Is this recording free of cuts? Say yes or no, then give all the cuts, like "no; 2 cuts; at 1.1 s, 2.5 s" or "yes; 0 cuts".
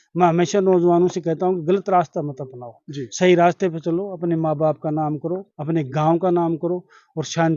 yes; 0 cuts